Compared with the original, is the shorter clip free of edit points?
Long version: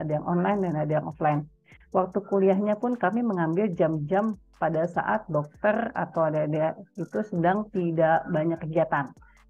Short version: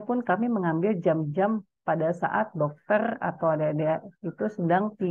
yes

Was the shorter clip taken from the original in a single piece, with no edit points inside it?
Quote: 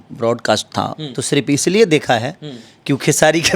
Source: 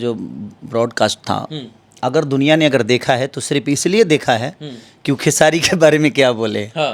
no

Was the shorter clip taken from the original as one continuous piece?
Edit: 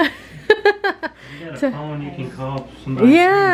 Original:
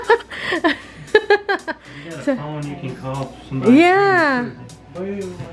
yes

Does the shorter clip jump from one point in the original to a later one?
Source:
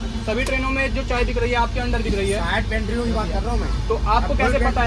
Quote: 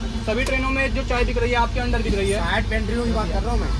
no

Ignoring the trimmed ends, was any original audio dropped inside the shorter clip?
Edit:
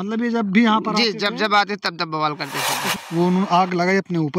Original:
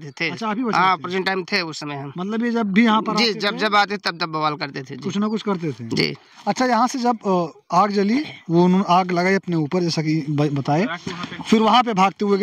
yes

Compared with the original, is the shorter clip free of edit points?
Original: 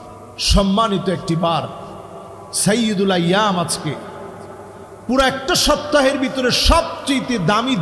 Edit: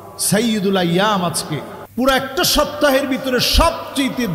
no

